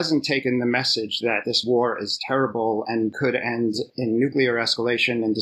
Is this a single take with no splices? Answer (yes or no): yes